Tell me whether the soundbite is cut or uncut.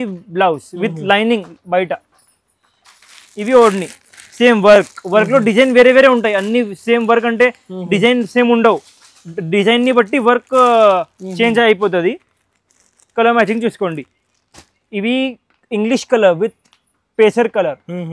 uncut